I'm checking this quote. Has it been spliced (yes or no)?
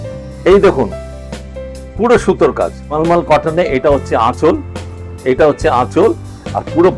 yes